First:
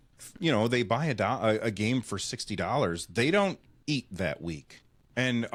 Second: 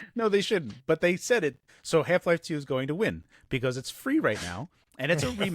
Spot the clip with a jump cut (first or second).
second